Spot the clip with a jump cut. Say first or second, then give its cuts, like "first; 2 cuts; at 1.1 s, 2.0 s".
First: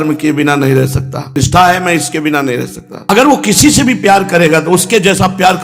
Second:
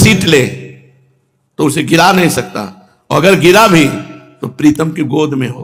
first; 1 cut; at 2.9 s